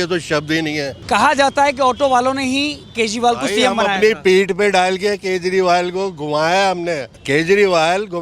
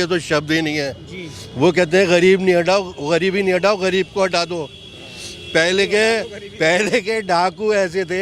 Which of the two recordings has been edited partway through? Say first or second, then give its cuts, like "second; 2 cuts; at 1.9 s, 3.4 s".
first; 2 cuts; at 0.9 s, 7.1 s